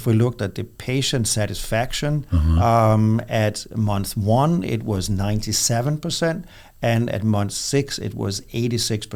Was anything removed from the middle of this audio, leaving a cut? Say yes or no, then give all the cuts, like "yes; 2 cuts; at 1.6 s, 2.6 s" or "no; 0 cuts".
no; 0 cuts